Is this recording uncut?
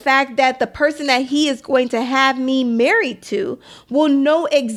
yes; 0 cuts

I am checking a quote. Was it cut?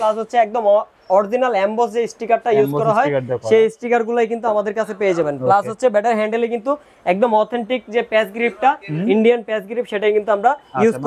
no; 0 cuts

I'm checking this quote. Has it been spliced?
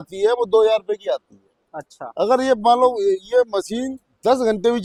no; 0 cuts

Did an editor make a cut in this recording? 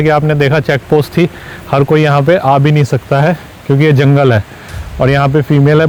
no; 0 cuts

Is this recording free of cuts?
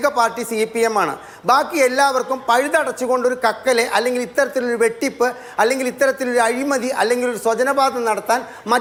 yes; 0 cuts

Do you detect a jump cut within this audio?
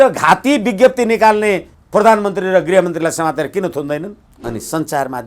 yes; 2 cuts; at 1.7 s, 4.3 s

